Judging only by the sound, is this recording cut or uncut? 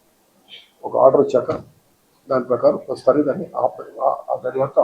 cut